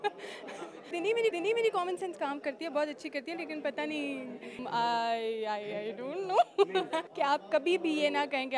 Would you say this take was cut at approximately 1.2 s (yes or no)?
yes